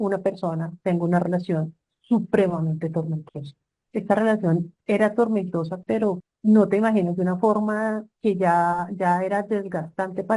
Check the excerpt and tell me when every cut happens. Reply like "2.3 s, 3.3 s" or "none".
6.3 s